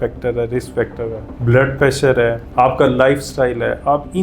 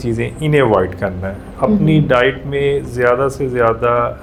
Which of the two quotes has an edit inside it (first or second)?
first